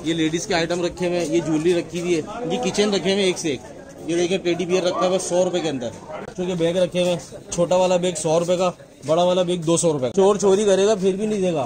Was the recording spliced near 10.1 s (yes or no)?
yes